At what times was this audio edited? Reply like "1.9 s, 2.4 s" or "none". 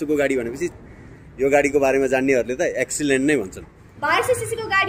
3.8 s

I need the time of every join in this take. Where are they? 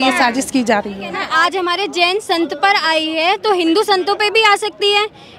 1.2 s

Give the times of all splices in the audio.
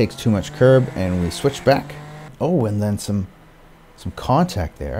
2.3 s

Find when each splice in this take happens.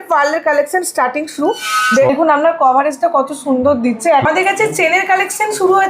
2.1 s, 4.2 s

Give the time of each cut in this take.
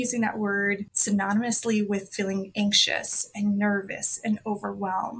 0.9 s

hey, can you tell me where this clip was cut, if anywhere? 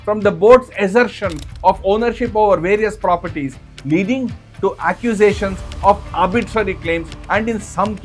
none

